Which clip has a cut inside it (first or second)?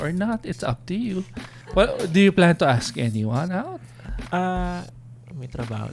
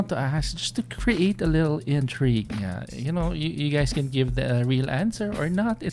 first